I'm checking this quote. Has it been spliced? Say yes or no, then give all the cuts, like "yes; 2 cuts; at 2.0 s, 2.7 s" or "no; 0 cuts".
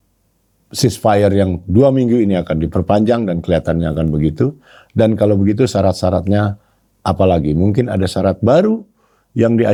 no; 0 cuts